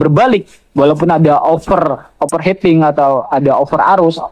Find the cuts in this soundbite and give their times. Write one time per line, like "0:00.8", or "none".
none